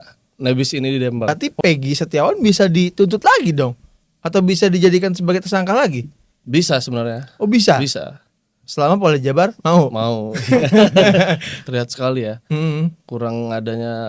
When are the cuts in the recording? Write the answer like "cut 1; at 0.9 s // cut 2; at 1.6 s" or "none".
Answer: cut 1; at 1.3 s // cut 2; at 11.5 s